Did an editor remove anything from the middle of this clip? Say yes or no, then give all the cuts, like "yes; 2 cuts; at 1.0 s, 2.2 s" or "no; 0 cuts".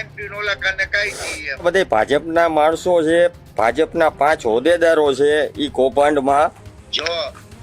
yes; 1 cut; at 1.6 s